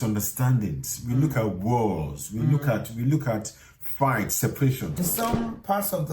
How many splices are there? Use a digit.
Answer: 1